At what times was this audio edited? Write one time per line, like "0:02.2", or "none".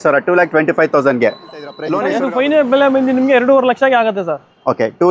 0:01.9